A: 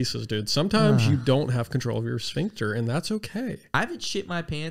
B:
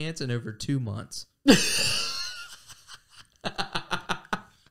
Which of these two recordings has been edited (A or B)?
A